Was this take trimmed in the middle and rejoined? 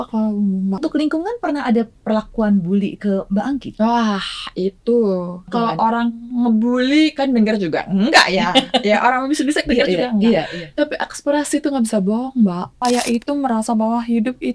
yes; 3 cuts; at 0.8 s, 5.5 s, 12.8 s

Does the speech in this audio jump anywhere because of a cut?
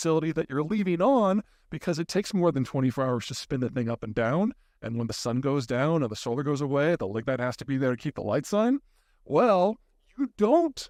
no; 0 cuts

